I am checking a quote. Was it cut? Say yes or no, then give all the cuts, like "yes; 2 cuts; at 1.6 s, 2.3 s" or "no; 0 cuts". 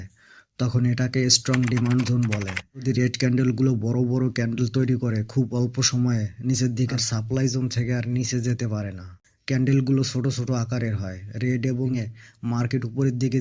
yes; 3 cuts; at 2.8 s, 6.9 s, 12.0 s